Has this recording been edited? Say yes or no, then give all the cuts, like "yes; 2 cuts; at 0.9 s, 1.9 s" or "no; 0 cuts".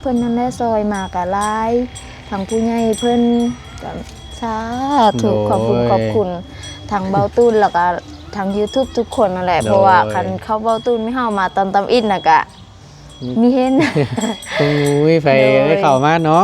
no; 0 cuts